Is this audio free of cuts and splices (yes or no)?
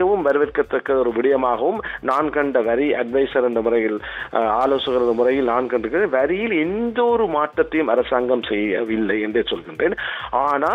yes